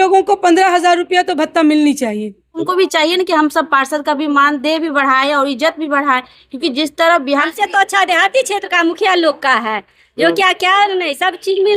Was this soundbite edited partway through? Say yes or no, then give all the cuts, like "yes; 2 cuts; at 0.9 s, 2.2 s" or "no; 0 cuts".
yes; 2 cuts; at 2.6 s, 7.3 s